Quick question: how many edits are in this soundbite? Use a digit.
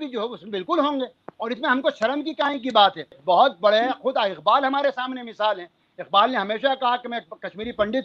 1